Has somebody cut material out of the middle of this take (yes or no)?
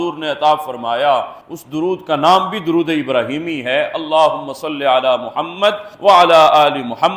no